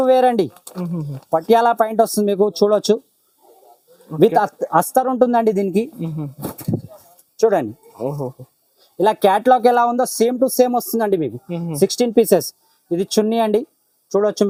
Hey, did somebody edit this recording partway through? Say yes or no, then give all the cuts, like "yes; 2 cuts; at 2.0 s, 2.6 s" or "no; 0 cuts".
no; 0 cuts